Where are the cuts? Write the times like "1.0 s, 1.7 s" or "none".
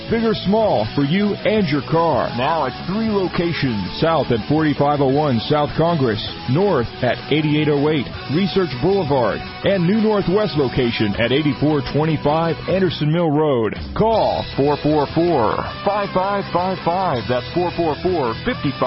none